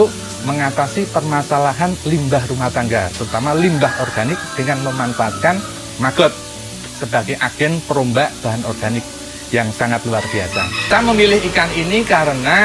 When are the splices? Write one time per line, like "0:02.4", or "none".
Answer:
0:10.9